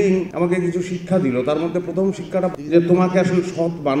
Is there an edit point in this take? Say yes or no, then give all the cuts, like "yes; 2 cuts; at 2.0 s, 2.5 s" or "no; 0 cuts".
yes; 1 cut; at 2.5 s